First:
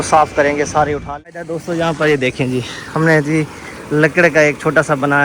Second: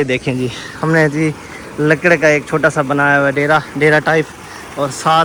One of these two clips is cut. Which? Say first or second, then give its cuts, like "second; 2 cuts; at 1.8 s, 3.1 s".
first; 1 cut; at 1.1 s